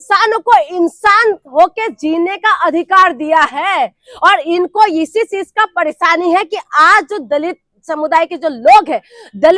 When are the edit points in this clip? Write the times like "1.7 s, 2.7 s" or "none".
none